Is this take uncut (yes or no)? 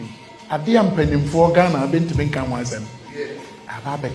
yes